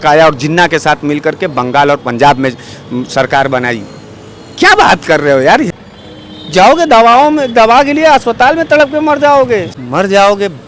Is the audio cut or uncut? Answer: cut